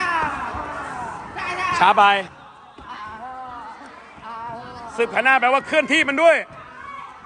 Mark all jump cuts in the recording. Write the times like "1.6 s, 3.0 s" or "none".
2.4 s